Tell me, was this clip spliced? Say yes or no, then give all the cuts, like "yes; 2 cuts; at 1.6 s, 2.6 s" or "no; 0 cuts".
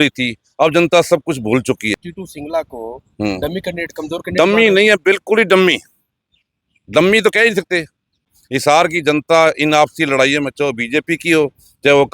yes; 2 cuts; at 2.0 s, 8.3 s